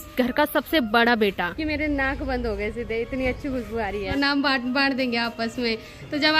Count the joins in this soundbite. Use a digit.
2